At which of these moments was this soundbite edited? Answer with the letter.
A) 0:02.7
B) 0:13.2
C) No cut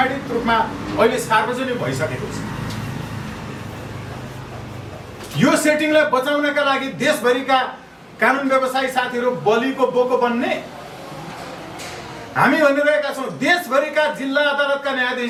C